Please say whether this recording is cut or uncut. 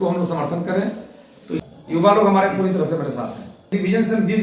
cut